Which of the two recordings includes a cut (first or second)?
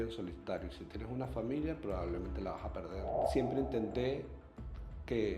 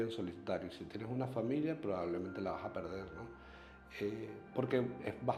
first